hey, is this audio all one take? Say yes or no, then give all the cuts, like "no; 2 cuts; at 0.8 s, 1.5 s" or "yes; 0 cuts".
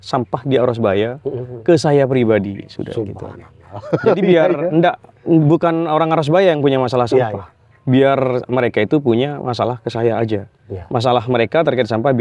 yes; 0 cuts